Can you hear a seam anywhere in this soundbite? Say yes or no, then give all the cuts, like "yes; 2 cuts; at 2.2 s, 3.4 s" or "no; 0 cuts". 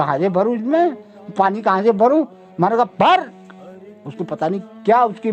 no; 0 cuts